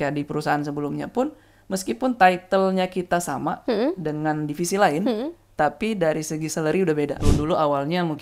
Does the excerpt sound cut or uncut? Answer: cut